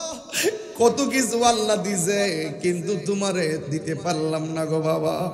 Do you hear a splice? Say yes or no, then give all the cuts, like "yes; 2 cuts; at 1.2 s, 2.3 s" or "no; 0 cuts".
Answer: no; 0 cuts